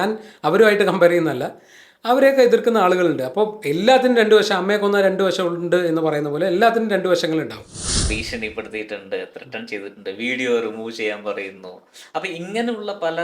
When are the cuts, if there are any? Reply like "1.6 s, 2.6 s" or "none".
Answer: 8.1 s